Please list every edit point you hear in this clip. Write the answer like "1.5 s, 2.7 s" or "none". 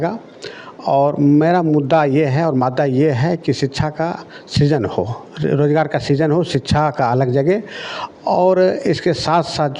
none